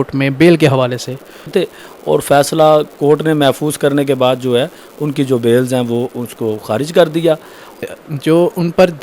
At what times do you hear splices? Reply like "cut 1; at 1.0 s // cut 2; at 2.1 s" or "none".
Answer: cut 1; at 1.5 s // cut 2; at 7.9 s